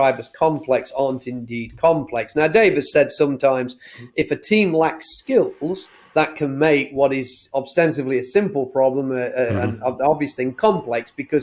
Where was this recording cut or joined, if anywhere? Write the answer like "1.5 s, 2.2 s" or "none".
none